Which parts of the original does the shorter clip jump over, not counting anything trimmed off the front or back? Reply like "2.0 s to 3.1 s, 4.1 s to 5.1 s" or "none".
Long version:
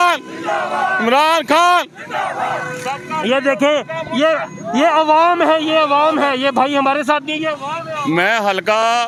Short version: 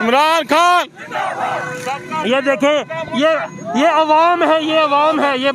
none